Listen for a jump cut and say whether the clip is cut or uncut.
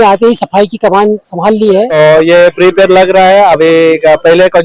cut